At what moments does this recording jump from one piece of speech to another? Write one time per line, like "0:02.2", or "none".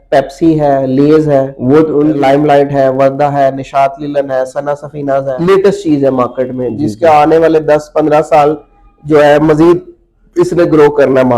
0:02.2
0:05.3